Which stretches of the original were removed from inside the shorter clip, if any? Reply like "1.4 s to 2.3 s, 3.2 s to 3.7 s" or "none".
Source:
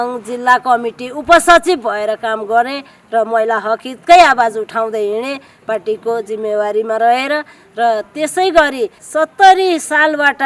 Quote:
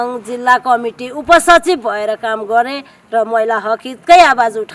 none